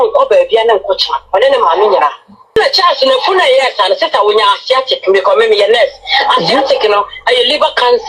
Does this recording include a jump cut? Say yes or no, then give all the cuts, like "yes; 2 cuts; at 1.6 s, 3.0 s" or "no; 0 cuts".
yes; 1 cut; at 2.5 s